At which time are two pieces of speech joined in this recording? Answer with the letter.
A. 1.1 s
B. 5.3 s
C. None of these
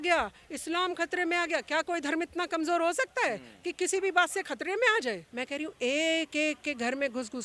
B